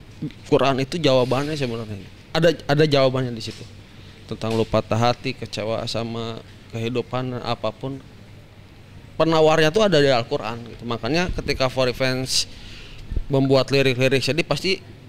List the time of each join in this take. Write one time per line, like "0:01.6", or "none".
none